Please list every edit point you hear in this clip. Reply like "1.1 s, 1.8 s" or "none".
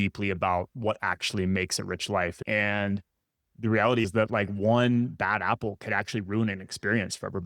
2.4 s